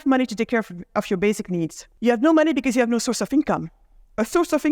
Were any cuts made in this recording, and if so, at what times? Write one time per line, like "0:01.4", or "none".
0:01.8